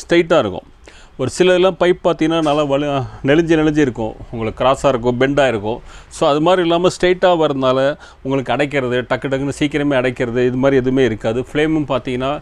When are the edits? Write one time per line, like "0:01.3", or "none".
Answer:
none